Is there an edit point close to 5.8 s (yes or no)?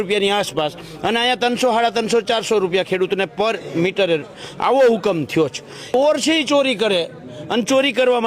yes